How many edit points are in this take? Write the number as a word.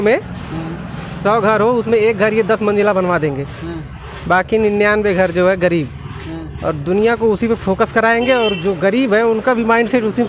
zero